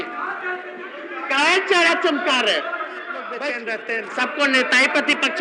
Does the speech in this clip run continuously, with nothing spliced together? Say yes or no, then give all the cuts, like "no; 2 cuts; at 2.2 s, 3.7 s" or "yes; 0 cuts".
no; 1 cut; at 3.4 s